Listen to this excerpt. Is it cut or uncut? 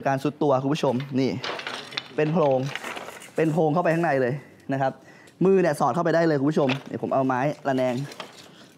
uncut